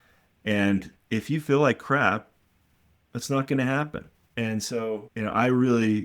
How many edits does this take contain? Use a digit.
2